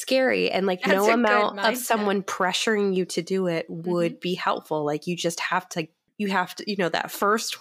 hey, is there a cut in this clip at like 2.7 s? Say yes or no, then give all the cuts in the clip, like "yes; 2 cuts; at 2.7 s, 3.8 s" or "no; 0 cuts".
no; 1 cut; at 6.0 s